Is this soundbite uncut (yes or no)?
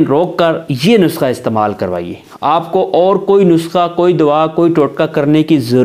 yes